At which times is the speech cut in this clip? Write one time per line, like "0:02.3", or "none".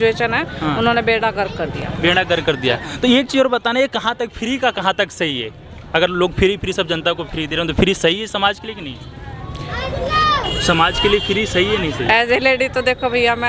none